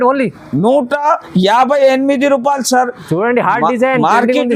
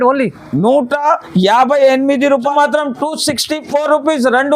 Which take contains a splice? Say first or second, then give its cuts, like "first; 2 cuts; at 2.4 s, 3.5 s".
second; 1 cut; at 2.5 s